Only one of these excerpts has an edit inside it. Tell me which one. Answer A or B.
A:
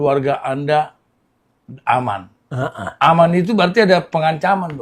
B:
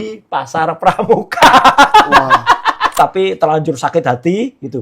B